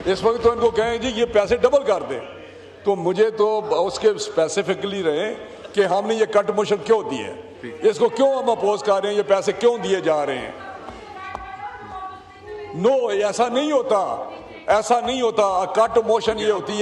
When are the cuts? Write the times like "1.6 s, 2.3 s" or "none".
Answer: none